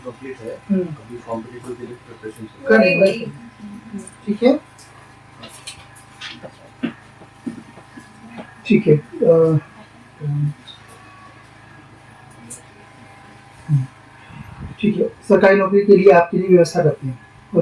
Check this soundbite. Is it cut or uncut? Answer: uncut